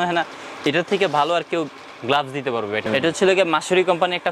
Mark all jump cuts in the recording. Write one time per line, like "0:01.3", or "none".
0:02.8